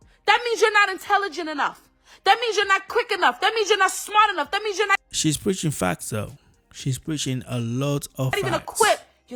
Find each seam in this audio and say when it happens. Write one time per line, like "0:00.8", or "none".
none